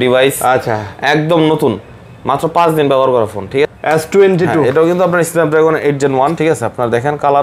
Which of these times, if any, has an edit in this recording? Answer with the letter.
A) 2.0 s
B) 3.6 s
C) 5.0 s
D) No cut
B